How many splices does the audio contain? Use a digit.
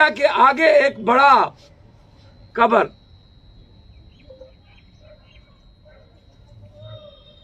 0